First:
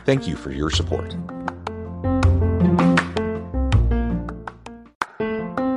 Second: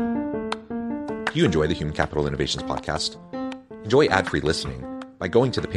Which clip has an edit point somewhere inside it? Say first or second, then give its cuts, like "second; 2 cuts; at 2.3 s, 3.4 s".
first; 1 cut; at 4.8 s